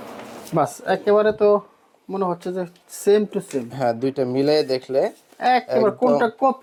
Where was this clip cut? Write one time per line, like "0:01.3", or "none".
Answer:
none